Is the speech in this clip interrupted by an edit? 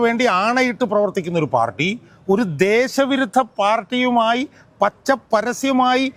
no; 0 cuts

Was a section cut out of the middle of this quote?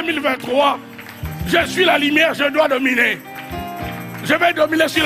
no; 0 cuts

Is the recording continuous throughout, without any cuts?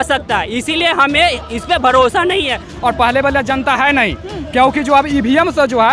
no; 1 cut; at 2.7 s

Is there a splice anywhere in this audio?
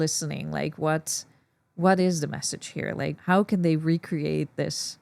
yes; 1 cut; at 3.1 s

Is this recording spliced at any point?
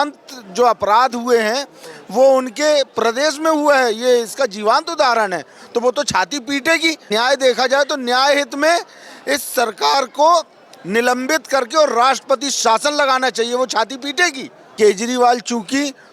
yes; 2 cuts; at 7.1 s, 14.6 s

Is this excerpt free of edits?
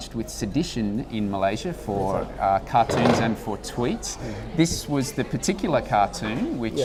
yes; 0 cuts

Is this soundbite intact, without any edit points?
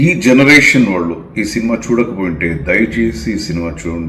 yes; 0 cuts

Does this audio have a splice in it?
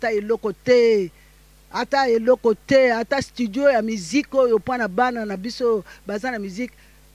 no; 0 cuts

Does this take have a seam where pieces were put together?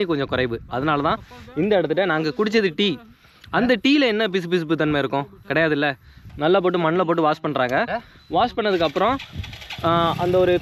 no; 0 cuts

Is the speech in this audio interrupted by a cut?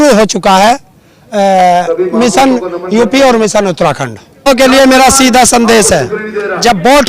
yes; 1 cut; at 4.5 s

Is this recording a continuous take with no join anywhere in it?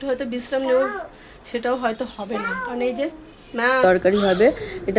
no; 1 cut; at 3.8 s

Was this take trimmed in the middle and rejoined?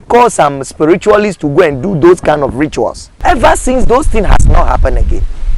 yes; 1 cut; at 3.0 s

